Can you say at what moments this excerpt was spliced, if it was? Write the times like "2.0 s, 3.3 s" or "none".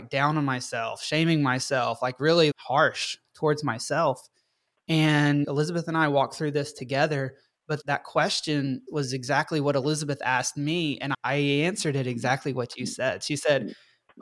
2.5 s, 7.8 s, 11.1 s